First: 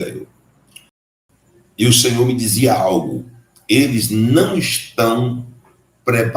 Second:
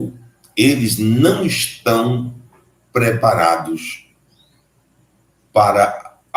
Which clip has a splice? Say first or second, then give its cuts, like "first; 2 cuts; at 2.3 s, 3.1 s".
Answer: first; 1 cut; at 1.0 s